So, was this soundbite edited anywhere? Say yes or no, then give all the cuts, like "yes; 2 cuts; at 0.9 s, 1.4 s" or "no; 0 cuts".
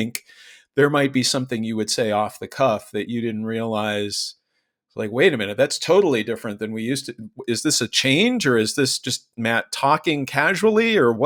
no; 0 cuts